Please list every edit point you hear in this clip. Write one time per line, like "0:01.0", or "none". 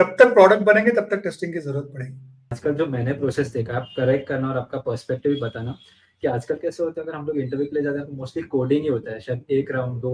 0:02.5